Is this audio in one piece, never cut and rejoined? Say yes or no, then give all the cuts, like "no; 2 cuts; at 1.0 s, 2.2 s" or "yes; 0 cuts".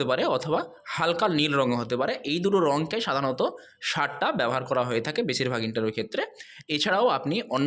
yes; 0 cuts